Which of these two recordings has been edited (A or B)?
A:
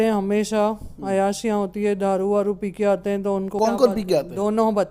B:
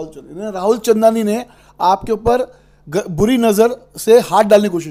A